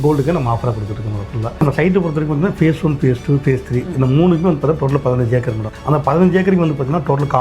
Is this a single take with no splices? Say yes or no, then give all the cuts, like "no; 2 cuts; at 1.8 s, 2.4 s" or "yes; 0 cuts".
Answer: no; 1 cut; at 1.6 s